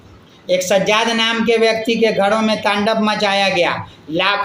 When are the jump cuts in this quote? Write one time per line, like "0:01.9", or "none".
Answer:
none